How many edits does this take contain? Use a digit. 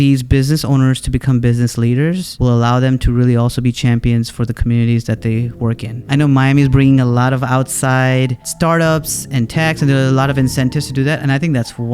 3